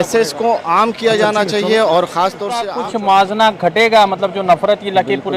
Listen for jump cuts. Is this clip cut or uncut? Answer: cut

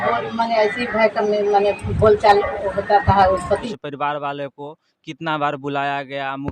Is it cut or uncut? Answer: cut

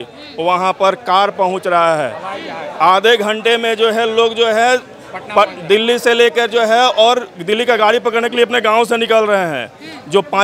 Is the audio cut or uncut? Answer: uncut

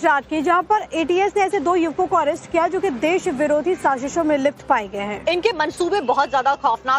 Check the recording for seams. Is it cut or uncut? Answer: cut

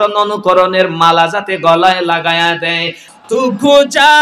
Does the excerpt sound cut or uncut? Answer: cut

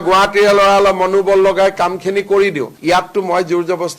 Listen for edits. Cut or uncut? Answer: uncut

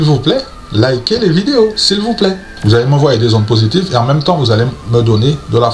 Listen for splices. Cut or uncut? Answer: cut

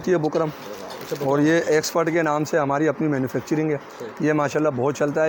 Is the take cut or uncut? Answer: uncut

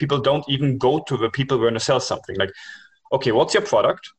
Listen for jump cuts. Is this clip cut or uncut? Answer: uncut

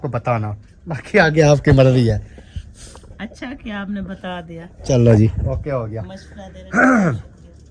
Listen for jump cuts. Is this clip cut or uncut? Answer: uncut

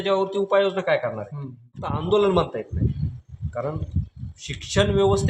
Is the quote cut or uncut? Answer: cut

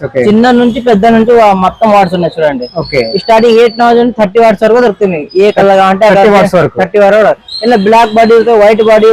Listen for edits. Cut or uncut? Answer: uncut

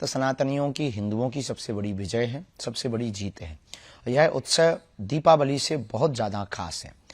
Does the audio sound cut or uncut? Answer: uncut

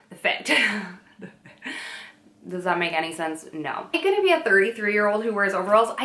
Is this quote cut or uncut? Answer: cut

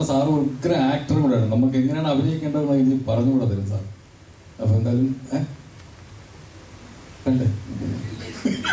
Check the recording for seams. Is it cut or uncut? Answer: uncut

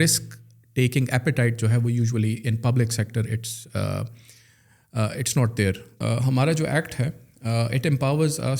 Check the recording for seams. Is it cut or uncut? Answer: cut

